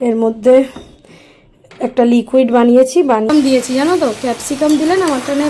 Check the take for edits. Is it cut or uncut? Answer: cut